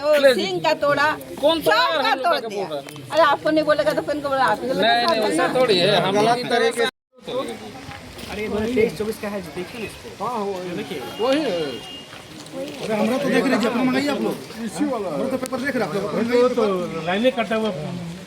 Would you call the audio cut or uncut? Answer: cut